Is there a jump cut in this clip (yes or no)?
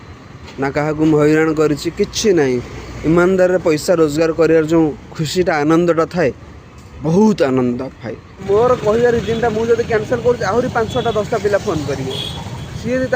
yes